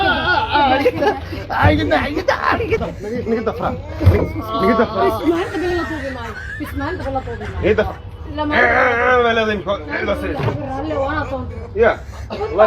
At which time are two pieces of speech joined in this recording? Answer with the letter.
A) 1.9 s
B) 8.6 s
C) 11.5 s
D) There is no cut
C